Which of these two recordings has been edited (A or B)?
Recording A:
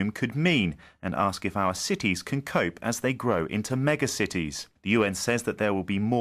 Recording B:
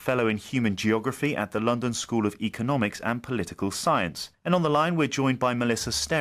B